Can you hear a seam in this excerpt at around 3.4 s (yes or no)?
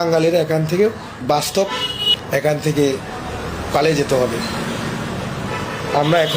no